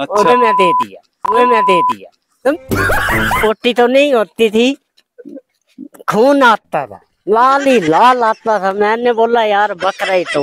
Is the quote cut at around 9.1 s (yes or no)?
no